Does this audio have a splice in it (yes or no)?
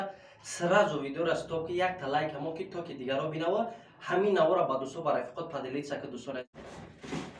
yes